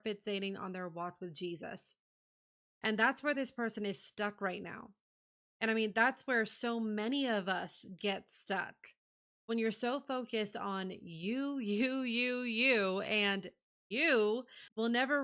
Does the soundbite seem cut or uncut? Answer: uncut